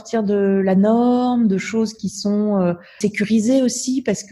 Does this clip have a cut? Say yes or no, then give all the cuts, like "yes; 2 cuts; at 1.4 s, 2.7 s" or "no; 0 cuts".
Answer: yes; 1 cut; at 3.0 s